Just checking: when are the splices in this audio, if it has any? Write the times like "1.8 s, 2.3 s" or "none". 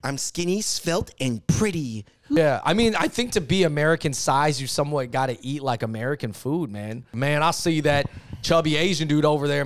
2.4 s, 7.1 s